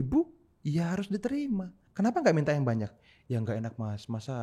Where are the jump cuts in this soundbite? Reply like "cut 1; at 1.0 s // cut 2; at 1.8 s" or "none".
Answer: cut 1; at 1.8 s

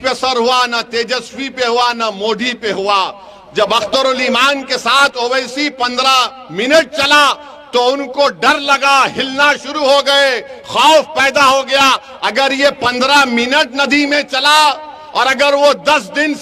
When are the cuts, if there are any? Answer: none

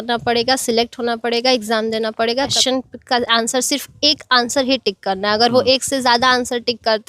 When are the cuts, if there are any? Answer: cut 1; at 2.5 s

